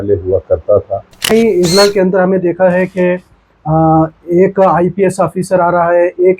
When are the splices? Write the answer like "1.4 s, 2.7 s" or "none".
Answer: 1.3 s